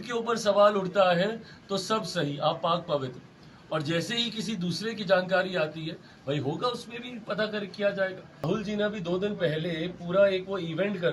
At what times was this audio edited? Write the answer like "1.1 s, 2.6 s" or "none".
8.5 s